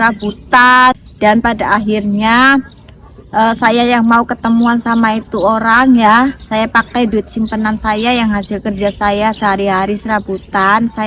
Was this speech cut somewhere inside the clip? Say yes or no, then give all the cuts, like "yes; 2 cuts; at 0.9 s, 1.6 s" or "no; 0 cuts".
yes; 1 cut; at 0.9 s